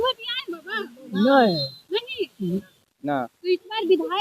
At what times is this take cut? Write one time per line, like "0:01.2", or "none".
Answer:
0:02.8